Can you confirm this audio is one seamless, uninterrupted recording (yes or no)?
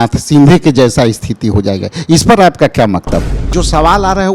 no